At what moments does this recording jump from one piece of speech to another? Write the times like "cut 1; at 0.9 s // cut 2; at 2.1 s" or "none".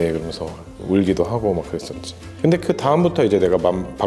none

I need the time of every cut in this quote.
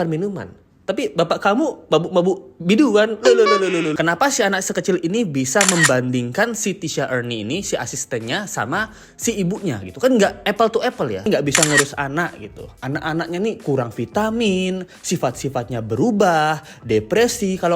cut 1; at 3.9 s // cut 2; at 11.3 s

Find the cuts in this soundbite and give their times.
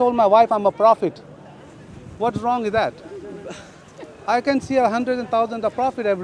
none

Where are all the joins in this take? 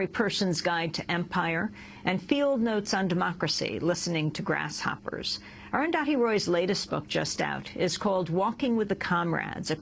none

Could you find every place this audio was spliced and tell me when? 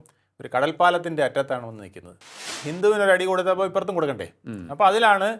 cut 1; at 2.5 s

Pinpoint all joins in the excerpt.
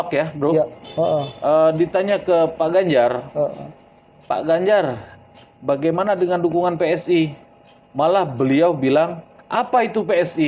none

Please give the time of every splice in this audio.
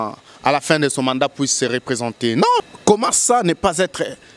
cut 1; at 2.6 s

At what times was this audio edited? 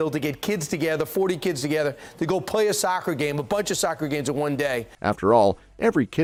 none

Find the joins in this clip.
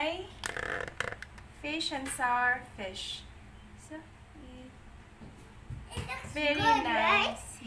none

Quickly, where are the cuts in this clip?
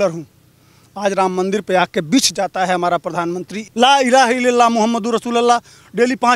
cut 1; at 3.5 s

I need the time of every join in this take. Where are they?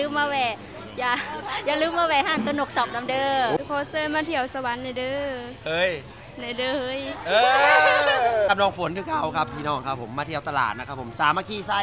cut 1; at 3.6 s // cut 2; at 8.5 s

